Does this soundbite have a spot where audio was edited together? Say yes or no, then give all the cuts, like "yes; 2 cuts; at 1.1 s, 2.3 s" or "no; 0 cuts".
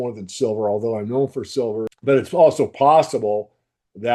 yes; 1 cut; at 1.9 s